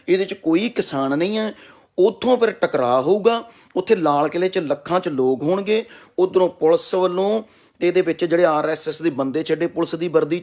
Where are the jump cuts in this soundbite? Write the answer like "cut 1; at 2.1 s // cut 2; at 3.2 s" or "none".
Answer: none